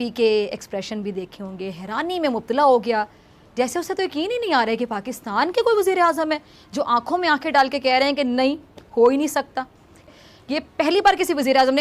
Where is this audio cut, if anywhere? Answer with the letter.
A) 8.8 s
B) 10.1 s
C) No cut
B